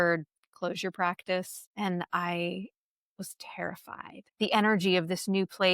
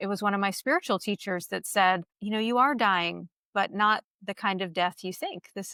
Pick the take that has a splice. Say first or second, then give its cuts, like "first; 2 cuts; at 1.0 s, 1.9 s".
first; 2 cuts; at 1.6 s, 4.2 s